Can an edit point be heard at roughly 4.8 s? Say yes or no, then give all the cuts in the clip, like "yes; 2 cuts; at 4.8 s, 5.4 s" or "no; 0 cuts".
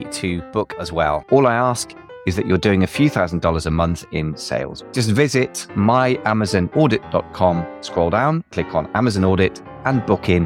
yes; 2 cuts; at 0.8 s, 4.8 s